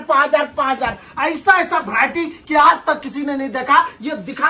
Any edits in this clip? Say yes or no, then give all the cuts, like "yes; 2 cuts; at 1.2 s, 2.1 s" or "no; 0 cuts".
no; 0 cuts